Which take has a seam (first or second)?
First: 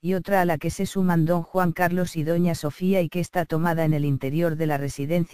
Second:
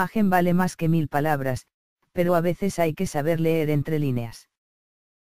first